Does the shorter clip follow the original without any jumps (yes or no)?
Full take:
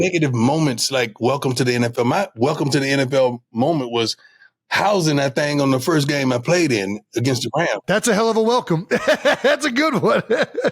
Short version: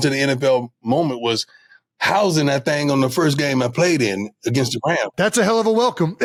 yes